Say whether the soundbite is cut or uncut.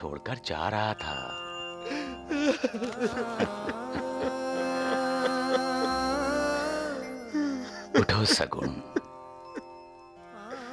uncut